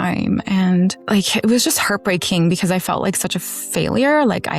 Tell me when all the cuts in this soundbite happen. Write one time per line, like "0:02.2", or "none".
0:01.0